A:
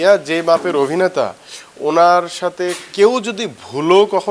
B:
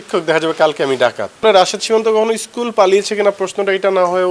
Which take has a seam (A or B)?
B